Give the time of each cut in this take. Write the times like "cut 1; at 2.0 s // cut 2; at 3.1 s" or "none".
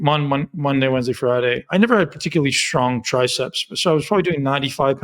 cut 1; at 1.6 s